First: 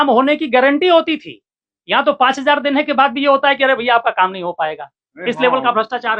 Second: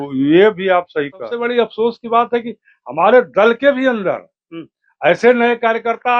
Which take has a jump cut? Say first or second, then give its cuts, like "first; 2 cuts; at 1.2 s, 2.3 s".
second; 1 cut; at 1.4 s